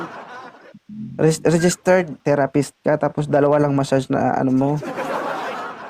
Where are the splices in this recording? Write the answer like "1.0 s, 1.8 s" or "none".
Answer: 2.2 s